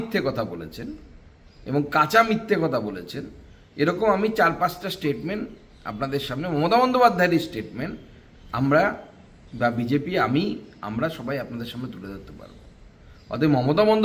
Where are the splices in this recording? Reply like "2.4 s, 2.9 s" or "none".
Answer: none